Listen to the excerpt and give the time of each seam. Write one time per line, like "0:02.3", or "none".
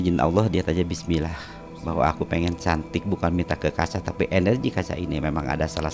none